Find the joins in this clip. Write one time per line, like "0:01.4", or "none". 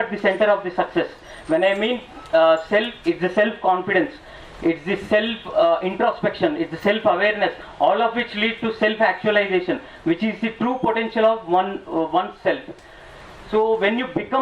none